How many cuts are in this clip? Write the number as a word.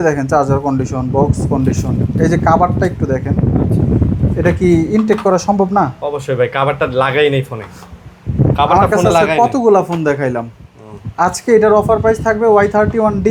zero